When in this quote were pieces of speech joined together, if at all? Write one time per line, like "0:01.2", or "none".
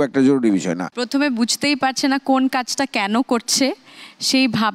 0:00.9